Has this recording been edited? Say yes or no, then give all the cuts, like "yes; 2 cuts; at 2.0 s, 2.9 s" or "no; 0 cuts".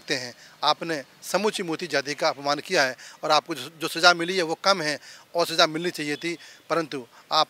no; 0 cuts